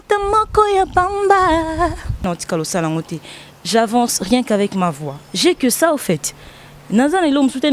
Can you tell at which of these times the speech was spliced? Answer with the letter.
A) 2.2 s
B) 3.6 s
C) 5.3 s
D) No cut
A